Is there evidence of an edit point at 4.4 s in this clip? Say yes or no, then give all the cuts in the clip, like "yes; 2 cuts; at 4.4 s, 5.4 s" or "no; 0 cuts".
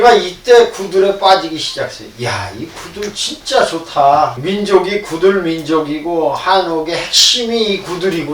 yes; 1 cut; at 4.4 s